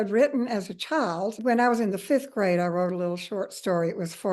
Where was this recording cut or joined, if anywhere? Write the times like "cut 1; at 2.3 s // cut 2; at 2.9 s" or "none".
cut 1; at 1.3 s